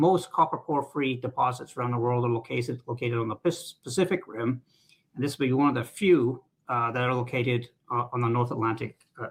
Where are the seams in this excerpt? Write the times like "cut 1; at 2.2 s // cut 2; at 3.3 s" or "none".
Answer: none

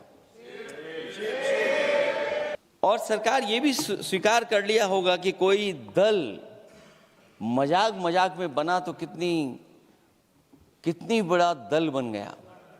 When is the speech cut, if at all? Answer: cut 1; at 2.6 s

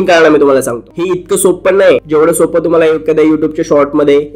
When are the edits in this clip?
cut 1; at 0.9 s // cut 2; at 2.0 s

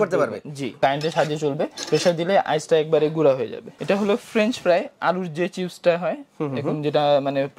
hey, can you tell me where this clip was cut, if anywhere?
cut 1; at 0.8 s // cut 2; at 3.7 s

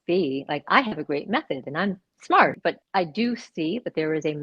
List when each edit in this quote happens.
cut 1; at 2.7 s

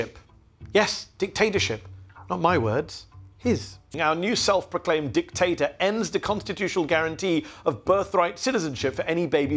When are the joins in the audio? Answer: cut 1; at 3.9 s

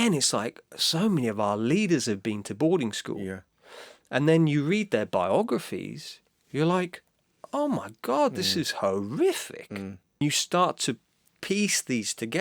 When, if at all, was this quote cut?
cut 1; at 10.2 s

